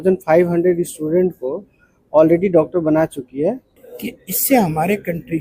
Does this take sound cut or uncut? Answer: cut